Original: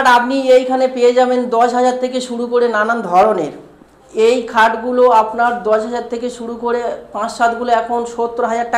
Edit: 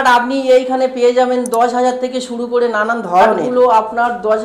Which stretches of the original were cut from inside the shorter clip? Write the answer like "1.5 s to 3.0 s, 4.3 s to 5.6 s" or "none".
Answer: 3.4 s to 4.9 s